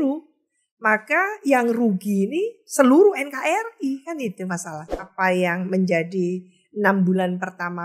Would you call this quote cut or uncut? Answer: cut